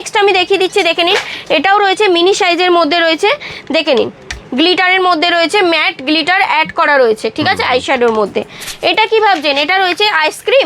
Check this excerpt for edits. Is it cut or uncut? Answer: cut